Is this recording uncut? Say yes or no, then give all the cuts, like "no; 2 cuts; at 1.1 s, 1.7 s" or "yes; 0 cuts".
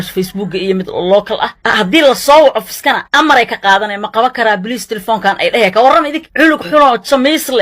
no; 1 cut; at 1.6 s